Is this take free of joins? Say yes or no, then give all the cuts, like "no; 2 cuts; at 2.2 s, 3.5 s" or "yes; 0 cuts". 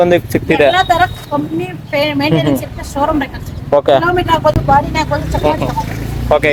yes; 0 cuts